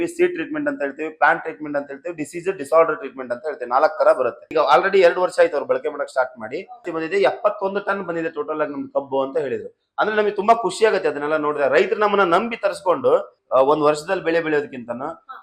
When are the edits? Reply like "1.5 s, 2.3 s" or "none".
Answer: 4.4 s, 6.9 s, 13.4 s